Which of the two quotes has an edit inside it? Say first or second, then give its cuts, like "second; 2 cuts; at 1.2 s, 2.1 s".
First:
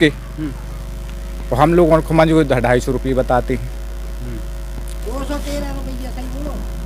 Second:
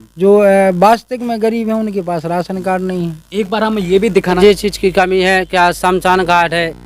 second; 1 cut; at 4.3 s